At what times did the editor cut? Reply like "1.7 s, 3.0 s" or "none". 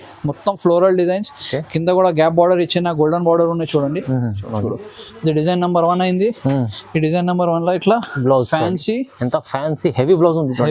4.5 s